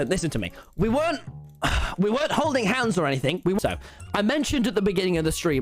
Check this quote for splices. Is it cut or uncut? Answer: cut